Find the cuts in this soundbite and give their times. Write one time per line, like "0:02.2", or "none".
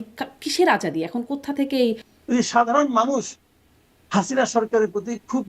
0:02.1